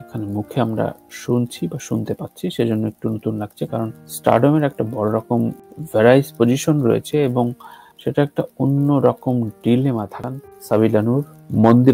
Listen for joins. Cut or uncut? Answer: cut